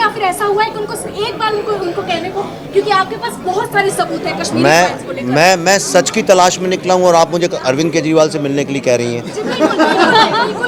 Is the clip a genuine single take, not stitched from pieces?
yes; 0 cuts

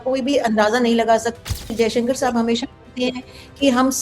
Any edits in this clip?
yes; 1 cut; at 1.4 s

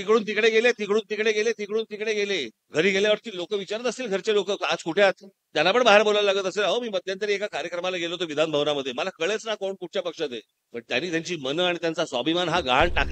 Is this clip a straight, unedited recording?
no; 3 cuts; at 2.6 s, 5.3 s, 10.6 s

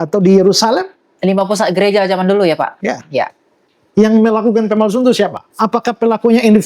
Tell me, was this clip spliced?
yes; 2 cuts; at 3.7 s, 5.4 s

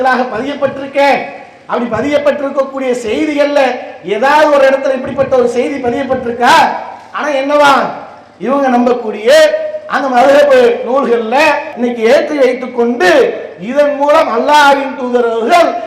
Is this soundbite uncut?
no; 1 cut; at 11.7 s

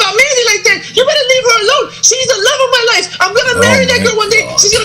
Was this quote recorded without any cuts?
yes; 0 cuts

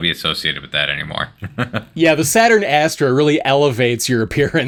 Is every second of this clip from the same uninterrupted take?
yes; 0 cuts

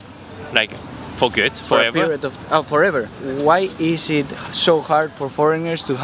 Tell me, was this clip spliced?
yes; 1 cut; at 3.5 s

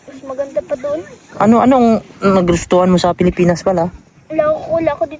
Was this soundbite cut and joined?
no; 0 cuts

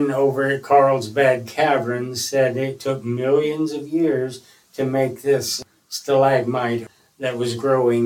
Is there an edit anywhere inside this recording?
yes; 2 cuts; at 5.5 s, 6.9 s

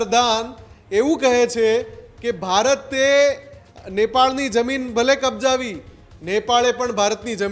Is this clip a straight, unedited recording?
yes; 0 cuts

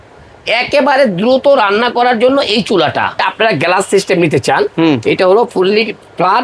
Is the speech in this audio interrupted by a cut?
yes; 1 cut; at 3.2 s

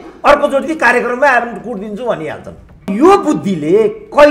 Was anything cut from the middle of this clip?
yes; 1 cut; at 2.9 s

